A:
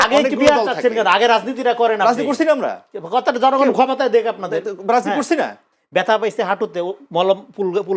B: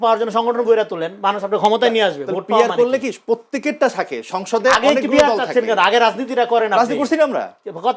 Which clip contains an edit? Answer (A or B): A